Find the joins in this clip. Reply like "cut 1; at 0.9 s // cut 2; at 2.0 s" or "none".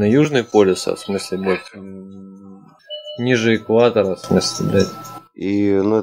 cut 1; at 2.8 s